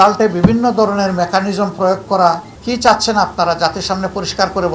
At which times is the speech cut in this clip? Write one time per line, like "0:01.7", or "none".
0:02.5